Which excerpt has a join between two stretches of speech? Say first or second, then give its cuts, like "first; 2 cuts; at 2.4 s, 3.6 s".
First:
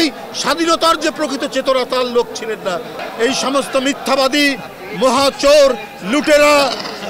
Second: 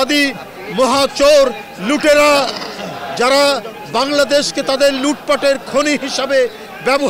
first; 1 cut; at 2.9 s